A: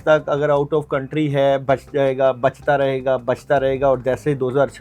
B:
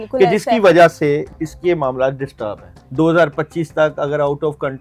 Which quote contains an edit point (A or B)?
B